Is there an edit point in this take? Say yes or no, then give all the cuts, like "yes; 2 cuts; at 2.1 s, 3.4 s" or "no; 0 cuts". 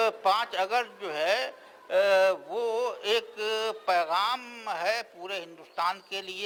no; 0 cuts